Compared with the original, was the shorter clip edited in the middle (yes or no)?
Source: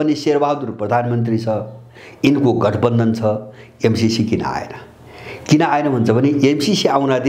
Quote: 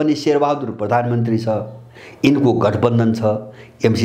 no